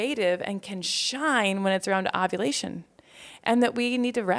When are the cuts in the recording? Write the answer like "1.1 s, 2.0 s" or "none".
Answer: none